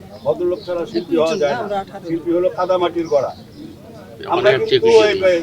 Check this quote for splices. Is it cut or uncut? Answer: uncut